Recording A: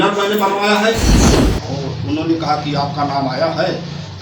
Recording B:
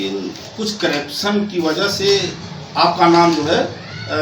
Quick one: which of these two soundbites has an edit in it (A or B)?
A